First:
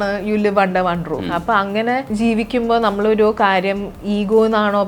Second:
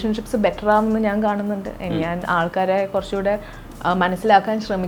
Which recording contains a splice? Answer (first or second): first